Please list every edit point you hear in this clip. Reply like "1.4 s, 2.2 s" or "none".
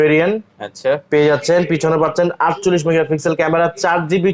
none